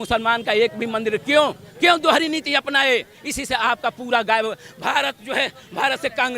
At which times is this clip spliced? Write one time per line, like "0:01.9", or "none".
none